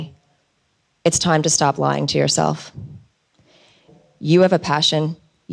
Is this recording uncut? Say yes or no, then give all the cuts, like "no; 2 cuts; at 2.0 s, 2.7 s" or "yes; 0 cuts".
no; 1 cut; at 3.9 s